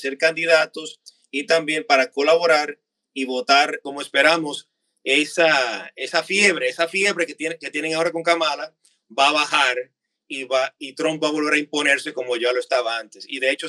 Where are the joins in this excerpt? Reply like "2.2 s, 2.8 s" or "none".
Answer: 3.8 s